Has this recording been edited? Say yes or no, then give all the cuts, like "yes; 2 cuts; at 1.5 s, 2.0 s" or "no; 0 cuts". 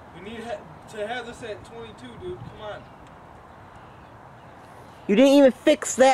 no; 0 cuts